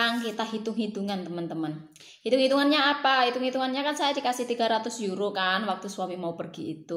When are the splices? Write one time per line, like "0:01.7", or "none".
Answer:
none

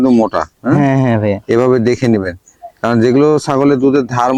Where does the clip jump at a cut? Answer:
none

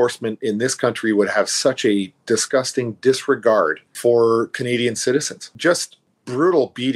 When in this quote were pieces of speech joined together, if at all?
0:03.8
0:05.4

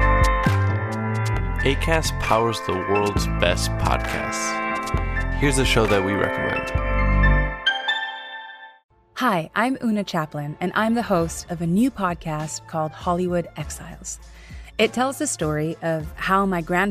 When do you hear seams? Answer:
0:00.9

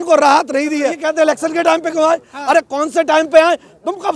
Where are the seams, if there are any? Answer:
0:01.0

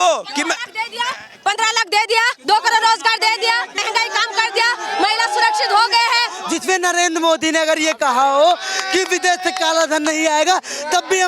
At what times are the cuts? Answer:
0:03.8
0:06.4

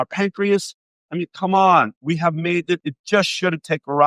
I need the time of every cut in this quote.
0:02.8

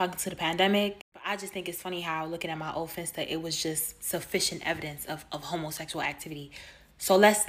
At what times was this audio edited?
0:01.1
0:06.0

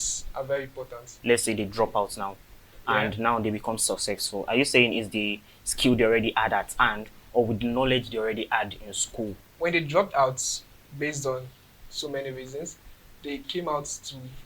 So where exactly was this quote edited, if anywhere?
0:01.2
0:09.4

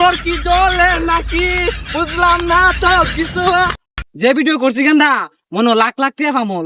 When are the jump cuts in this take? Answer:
0:03.8

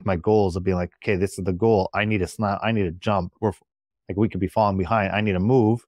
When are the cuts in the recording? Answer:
0:03.4

